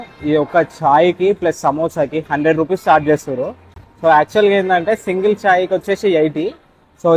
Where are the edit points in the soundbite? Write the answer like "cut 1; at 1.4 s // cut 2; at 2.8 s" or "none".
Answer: none